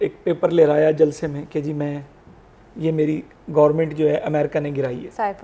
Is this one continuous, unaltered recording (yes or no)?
yes